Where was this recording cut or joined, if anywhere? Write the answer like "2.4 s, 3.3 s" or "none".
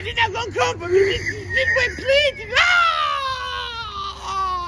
none